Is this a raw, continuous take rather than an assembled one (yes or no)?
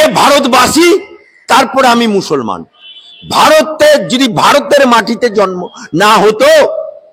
yes